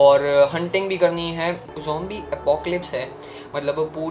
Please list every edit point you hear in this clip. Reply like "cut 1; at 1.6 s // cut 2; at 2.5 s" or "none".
cut 1; at 1.7 s

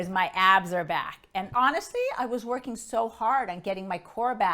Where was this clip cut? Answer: cut 1; at 1.5 s

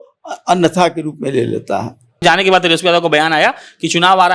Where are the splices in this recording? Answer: cut 1; at 2.2 s

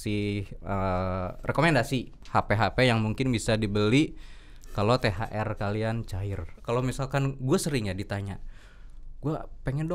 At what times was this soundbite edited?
cut 1; at 2.2 s // cut 2; at 6.5 s

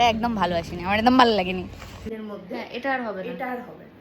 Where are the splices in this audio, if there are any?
cut 1; at 2.1 s

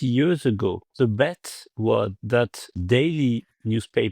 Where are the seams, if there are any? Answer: cut 1; at 0.9 s // cut 2; at 2.2 s

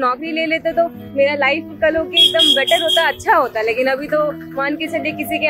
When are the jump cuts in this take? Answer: none

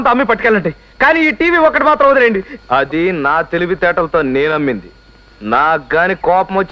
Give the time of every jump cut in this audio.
cut 1; at 2.5 s

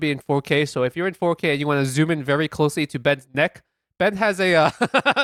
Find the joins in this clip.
none

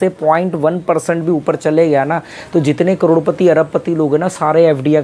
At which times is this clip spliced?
none

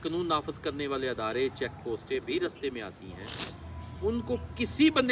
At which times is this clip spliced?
none

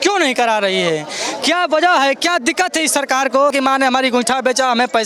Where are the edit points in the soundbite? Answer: cut 1; at 3.5 s

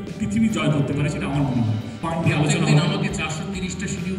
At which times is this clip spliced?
cut 1; at 2.0 s

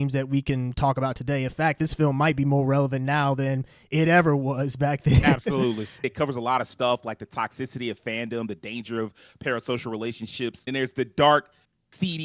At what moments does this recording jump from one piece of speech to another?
cut 1; at 6.1 s // cut 2; at 10.6 s

